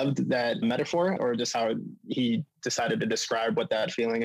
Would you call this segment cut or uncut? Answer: cut